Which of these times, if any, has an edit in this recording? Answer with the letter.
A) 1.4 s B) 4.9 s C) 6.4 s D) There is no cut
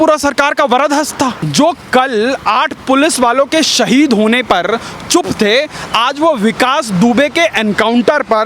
A